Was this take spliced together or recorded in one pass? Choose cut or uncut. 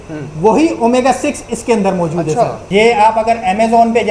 cut